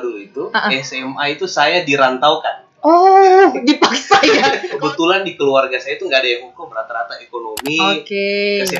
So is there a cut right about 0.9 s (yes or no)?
no